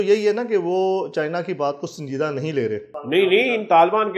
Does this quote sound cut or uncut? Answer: cut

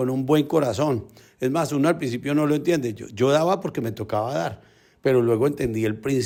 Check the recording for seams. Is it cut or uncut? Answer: uncut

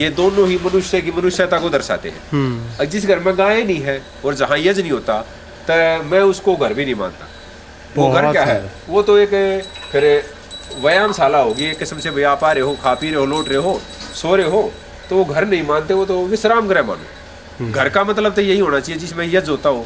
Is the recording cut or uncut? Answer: uncut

